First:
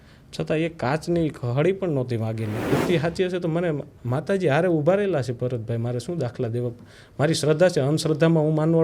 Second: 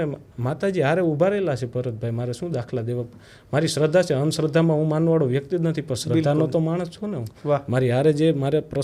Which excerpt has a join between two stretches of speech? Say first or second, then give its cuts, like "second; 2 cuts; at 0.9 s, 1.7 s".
first; 1 cut; at 2.7 s